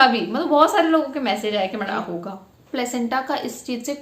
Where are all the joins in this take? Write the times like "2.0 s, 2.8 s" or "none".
2.0 s